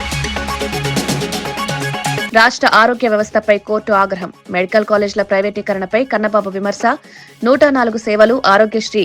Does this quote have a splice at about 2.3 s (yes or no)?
yes